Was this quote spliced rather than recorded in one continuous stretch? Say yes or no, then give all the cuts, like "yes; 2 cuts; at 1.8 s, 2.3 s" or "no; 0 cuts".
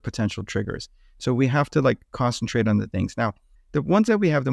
yes; 1 cut; at 3.4 s